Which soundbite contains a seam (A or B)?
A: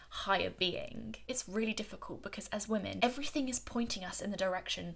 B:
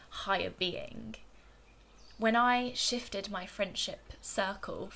A